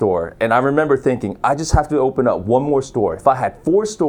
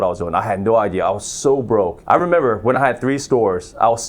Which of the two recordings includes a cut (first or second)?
second